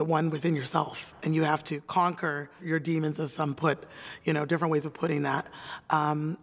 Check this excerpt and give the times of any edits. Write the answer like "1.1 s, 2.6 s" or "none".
1.1 s, 2.6 s

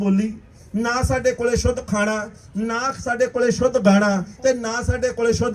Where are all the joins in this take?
none

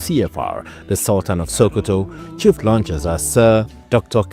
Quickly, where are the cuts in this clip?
none

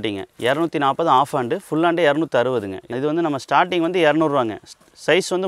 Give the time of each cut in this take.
2.9 s

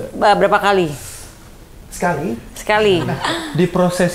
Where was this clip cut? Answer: 3.2 s

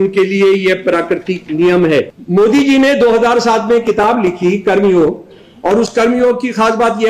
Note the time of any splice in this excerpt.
2.2 s

